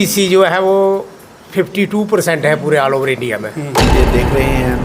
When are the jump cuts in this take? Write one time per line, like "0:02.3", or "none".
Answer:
0:03.9